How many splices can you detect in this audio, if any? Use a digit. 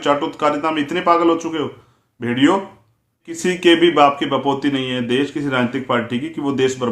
1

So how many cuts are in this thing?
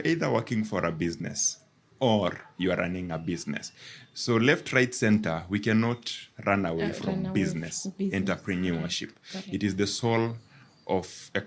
0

